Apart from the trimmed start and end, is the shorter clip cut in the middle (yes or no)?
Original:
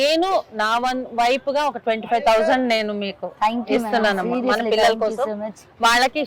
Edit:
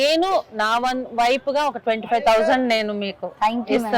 no